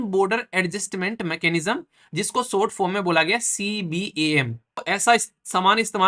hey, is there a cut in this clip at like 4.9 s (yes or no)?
yes